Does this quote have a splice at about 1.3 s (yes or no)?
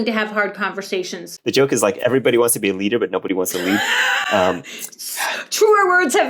yes